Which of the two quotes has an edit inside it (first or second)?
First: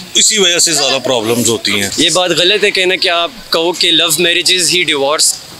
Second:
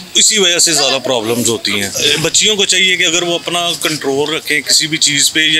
first